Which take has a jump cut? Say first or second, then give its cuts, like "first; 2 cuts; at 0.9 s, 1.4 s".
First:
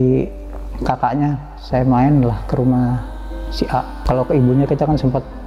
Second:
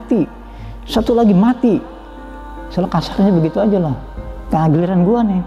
first; 1 cut; at 4.0 s